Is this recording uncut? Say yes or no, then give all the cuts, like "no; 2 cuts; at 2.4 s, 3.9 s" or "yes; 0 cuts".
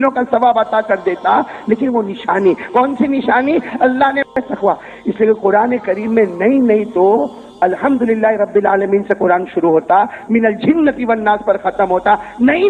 no; 1 cut; at 4.3 s